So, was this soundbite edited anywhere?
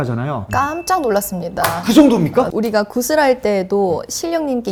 no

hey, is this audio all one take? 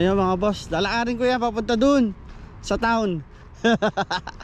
yes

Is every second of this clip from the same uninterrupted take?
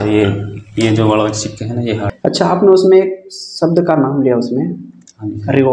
no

